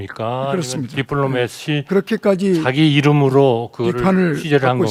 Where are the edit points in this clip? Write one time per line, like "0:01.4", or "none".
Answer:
none